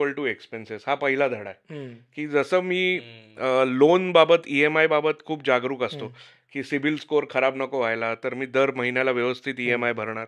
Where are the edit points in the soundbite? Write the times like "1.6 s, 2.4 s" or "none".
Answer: none